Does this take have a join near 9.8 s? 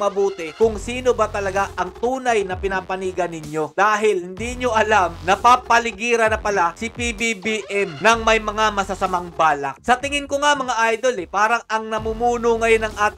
no; 0 cuts

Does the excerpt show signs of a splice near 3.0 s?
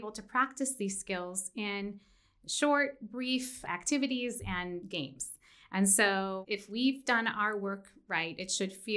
no; 1 cut; at 6.4 s

